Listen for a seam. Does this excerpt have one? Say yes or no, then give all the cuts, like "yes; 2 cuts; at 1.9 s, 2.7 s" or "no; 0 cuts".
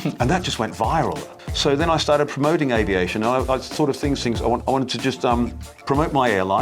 yes; 3 cuts; at 1.4 s, 4.6 s, 5.7 s